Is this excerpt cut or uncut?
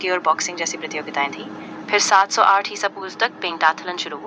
uncut